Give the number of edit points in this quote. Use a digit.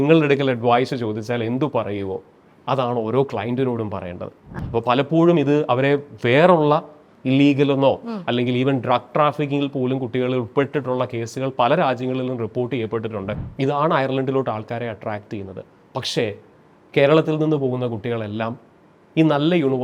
2